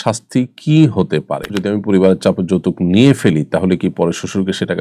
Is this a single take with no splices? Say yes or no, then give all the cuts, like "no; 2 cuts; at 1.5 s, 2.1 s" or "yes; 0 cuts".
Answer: no; 1 cut; at 1.6 s